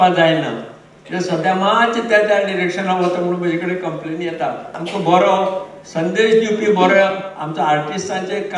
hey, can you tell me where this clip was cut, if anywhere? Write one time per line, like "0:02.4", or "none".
0:04.8